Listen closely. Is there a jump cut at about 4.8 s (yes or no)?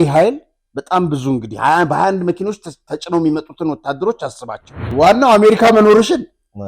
yes